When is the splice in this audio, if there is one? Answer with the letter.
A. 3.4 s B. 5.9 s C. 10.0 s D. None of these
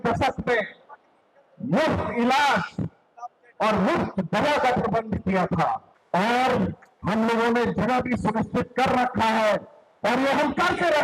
B